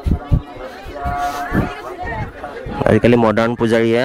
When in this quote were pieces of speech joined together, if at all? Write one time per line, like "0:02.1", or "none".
none